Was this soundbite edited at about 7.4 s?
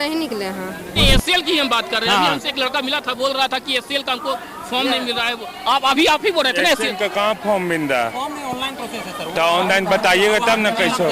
no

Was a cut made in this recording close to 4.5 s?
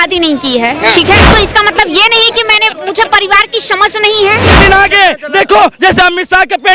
yes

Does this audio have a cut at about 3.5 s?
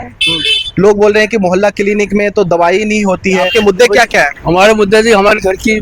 yes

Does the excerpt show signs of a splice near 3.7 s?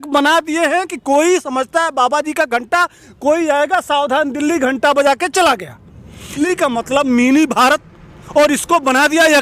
no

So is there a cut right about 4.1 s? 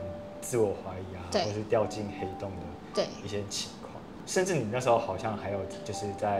yes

